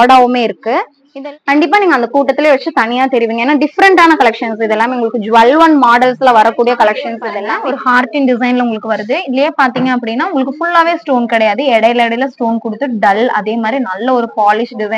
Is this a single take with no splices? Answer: no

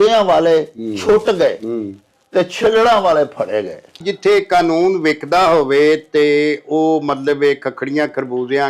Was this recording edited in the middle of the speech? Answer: yes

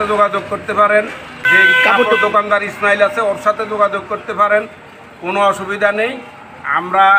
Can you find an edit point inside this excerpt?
no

